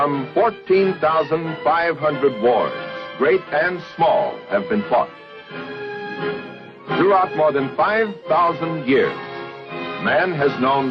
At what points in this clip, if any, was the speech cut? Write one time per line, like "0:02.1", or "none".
0:04.2